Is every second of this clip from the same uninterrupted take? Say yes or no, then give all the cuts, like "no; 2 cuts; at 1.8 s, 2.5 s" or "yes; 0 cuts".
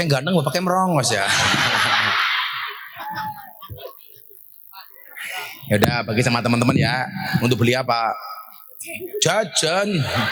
yes; 0 cuts